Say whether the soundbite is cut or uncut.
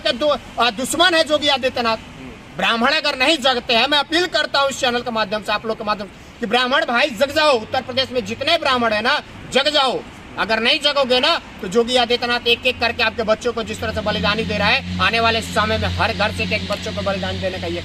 uncut